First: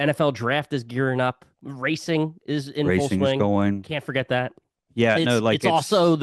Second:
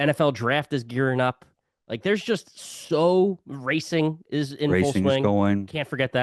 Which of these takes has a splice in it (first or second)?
first